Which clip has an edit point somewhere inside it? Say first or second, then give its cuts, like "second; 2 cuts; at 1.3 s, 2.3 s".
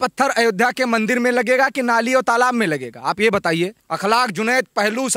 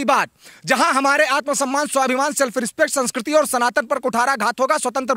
first; 1 cut; at 3.8 s